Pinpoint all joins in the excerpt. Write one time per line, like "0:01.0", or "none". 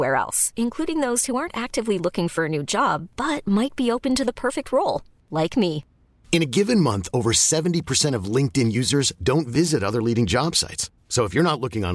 none